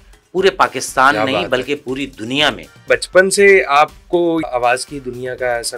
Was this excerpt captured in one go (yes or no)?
no